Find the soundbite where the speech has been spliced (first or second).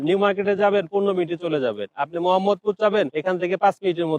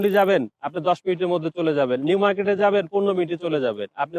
first